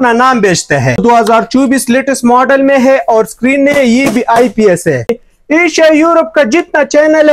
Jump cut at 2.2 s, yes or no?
no